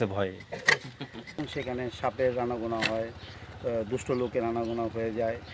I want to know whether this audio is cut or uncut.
cut